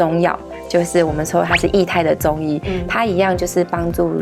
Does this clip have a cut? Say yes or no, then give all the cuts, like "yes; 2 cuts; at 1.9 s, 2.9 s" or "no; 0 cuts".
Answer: no; 0 cuts